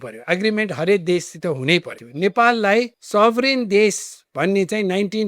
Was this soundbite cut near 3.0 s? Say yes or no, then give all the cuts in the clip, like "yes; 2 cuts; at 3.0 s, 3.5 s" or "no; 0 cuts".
yes; 2 cuts; at 2.0 s, 3.0 s